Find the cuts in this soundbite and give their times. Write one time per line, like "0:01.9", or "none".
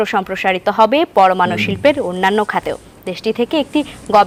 none